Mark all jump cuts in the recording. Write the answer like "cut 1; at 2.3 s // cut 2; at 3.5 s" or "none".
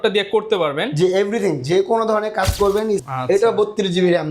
cut 1; at 3.0 s